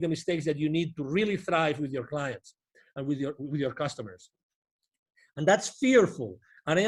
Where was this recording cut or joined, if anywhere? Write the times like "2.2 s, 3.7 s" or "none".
none